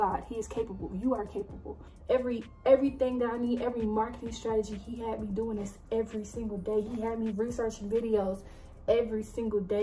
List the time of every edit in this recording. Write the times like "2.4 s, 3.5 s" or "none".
1.7 s